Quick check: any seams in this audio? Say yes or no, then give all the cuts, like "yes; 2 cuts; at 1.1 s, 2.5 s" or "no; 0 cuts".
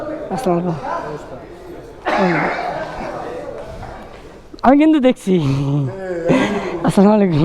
no; 0 cuts